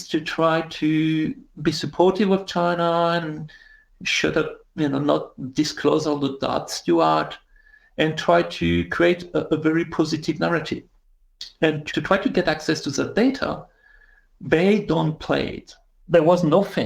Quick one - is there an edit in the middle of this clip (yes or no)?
yes